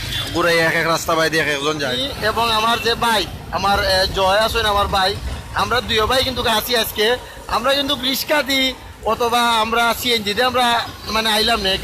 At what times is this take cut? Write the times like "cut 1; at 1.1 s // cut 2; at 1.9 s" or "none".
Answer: cut 1; at 2.0 s